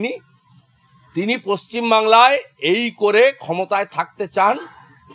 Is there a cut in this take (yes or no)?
no